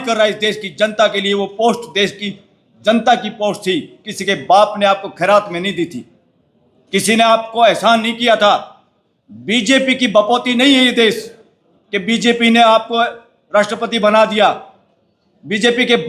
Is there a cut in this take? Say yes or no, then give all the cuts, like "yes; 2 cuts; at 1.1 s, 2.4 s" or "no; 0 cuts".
no; 0 cuts